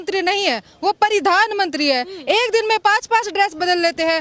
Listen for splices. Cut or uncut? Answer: uncut